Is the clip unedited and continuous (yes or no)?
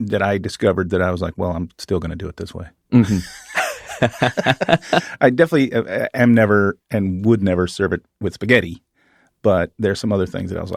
yes